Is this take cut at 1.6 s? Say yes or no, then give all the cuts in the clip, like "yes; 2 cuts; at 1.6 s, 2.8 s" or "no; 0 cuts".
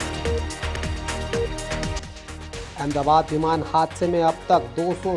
yes; 1 cut; at 1.6 s